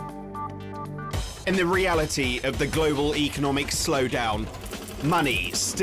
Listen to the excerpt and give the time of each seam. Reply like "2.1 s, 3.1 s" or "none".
4.0 s